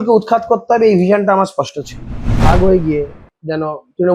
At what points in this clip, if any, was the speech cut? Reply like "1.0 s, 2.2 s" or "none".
2.4 s

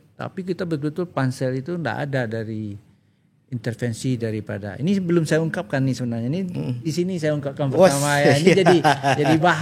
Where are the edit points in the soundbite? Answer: none

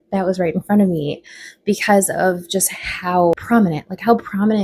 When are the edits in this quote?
3.3 s

